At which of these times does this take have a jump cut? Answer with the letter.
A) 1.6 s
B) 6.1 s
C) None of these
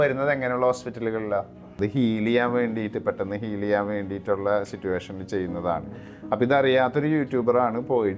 A